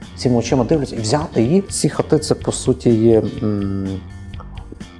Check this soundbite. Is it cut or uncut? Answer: cut